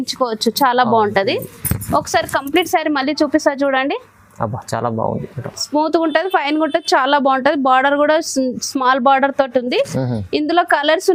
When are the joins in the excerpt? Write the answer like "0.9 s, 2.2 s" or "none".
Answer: none